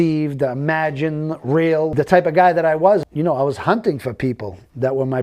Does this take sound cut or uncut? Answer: cut